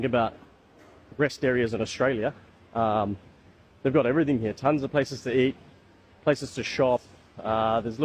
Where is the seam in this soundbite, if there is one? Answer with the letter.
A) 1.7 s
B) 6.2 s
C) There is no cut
C